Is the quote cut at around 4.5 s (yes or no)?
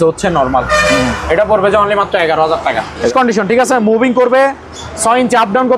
no